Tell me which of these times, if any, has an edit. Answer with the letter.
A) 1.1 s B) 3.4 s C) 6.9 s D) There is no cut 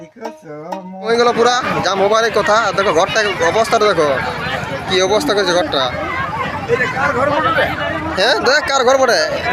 A